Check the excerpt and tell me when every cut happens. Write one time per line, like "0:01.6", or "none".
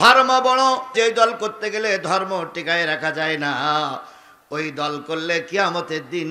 0:00.9